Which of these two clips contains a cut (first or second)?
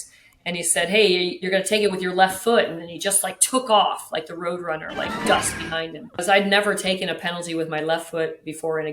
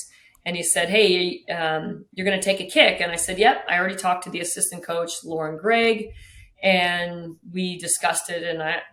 first